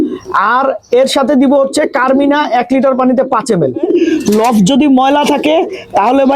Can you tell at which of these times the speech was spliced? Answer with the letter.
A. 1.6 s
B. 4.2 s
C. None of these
B